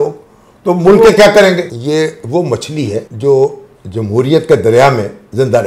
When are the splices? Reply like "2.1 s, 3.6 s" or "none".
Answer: 1.7 s, 3.1 s